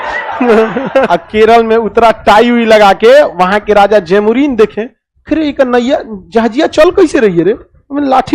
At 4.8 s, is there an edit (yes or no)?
no